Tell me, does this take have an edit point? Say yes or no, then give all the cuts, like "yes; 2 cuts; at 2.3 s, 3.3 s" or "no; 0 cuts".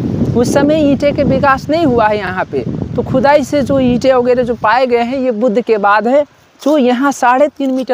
no; 0 cuts